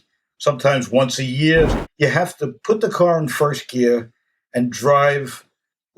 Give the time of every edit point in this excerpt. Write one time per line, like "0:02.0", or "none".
0:01.7